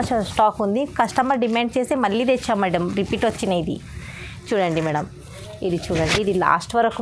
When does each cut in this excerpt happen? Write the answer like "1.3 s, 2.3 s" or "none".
none